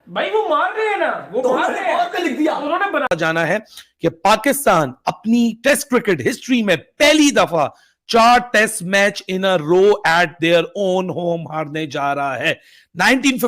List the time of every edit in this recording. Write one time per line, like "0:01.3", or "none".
0:03.1

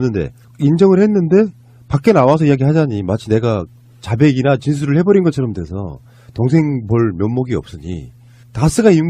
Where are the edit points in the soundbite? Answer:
none

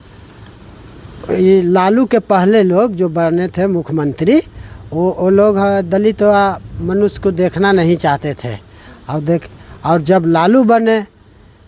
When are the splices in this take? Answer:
none

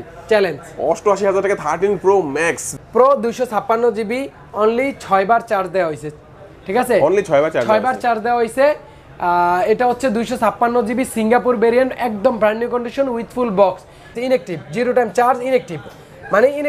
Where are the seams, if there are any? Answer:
0:02.7
0:14.1

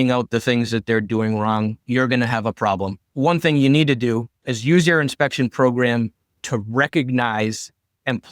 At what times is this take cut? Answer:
0:03.0

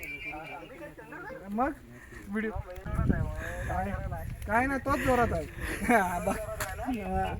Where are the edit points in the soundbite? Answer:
0:02.9

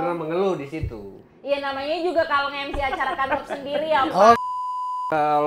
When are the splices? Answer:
0:04.5

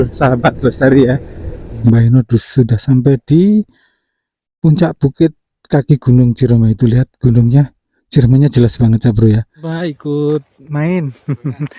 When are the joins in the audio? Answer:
0:01.8
0:09.7

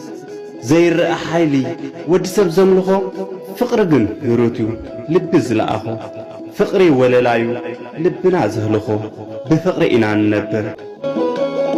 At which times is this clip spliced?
0:10.8

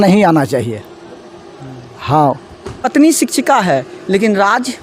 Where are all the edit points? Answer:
none

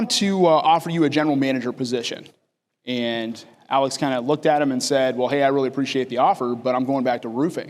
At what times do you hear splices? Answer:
none

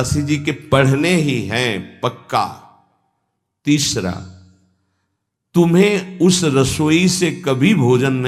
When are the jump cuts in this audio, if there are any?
none

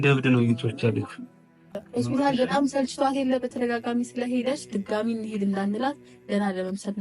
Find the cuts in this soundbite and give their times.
0:01.8

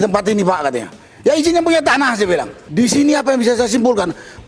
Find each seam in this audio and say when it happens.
0:02.6

